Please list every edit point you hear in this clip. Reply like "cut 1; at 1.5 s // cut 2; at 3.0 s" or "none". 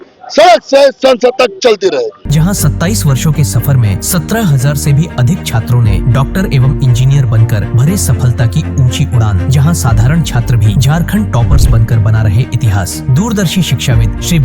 none